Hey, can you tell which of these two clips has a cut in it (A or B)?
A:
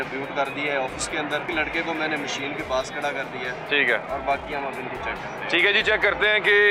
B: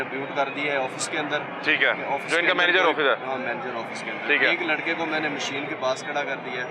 A